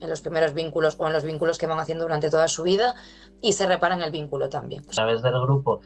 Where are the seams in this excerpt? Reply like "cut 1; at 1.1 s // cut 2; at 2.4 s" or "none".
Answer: cut 1; at 4.9 s